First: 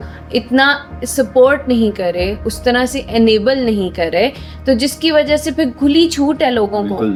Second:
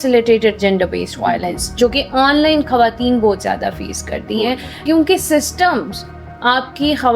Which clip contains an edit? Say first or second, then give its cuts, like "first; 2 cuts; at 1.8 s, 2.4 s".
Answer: second; 1 cut; at 4.8 s